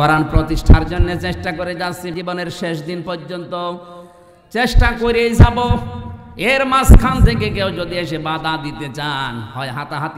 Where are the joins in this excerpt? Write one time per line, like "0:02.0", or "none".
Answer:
0:02.1

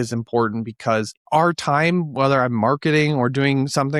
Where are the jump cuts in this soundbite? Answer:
none

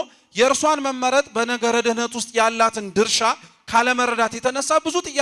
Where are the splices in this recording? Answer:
none

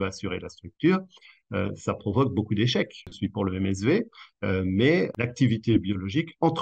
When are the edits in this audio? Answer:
0:03.1
0:05.1

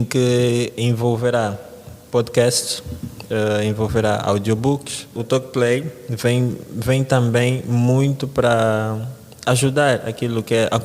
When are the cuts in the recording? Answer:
0:05.2

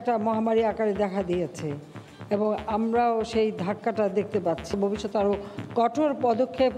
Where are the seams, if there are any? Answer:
0:04.7

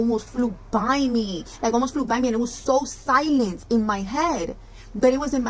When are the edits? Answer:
none

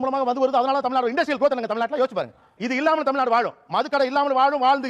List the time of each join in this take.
none

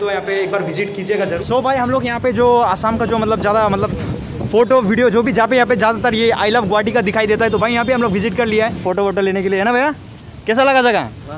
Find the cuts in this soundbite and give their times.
0:01.4
0:08.8

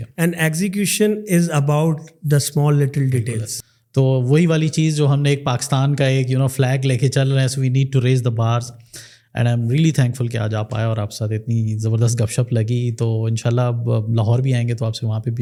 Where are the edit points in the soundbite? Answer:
none

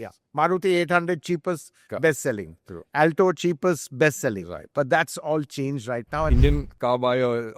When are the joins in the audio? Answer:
0:06.3

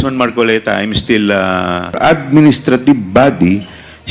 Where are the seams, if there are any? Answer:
0:02.0

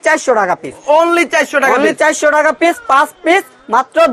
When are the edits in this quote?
none

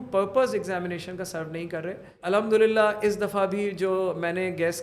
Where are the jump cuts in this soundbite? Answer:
0:02.2

